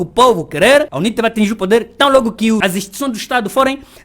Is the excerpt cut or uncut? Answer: cut